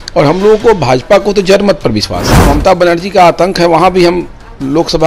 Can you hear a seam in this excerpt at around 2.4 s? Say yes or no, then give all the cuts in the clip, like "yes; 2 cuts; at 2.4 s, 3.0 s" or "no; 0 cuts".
yes; 1 cut; at 2.4 s